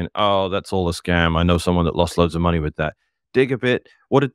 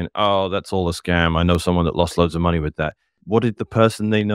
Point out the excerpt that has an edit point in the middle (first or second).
second